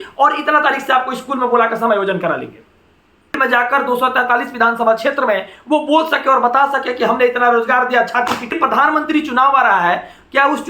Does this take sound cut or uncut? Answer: cut